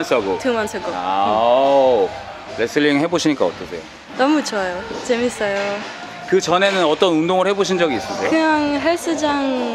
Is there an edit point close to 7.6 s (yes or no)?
no